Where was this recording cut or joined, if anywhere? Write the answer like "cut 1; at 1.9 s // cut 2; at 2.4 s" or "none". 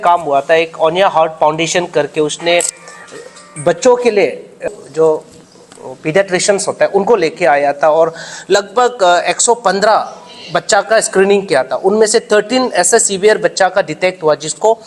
cut 1; at 4.7 s